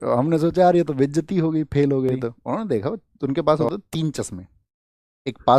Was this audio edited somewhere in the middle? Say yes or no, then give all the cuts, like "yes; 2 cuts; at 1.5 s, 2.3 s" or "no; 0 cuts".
yes; 1 cut; at 2.4 s